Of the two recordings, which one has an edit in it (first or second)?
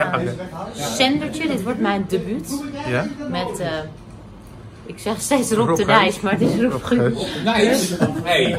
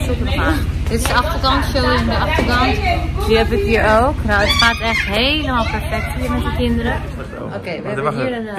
second